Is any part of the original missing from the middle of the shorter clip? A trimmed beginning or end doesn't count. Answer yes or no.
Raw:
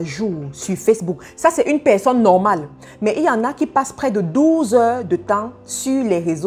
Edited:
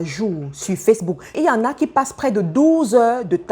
yes